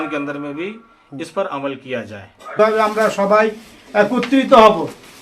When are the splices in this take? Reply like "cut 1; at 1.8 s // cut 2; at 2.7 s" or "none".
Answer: cut 1; at 2.6 s